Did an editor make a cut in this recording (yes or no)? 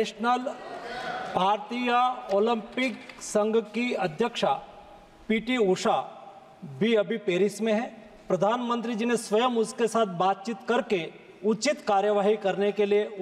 no